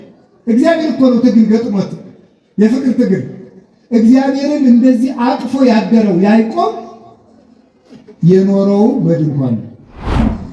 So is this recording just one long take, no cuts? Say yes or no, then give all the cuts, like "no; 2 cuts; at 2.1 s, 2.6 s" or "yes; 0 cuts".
yes; 0 cuts